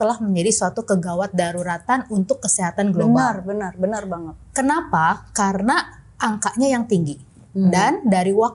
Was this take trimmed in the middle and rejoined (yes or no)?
no